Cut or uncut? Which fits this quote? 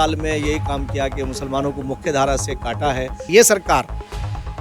cut